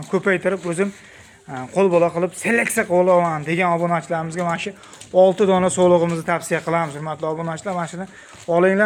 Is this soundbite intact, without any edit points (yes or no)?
yes